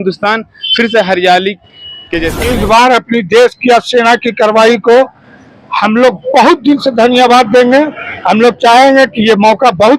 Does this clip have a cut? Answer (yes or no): yes